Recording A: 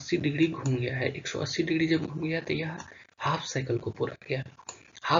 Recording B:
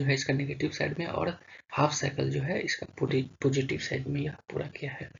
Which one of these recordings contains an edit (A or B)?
A